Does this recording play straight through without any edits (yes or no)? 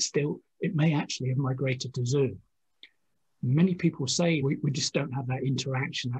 no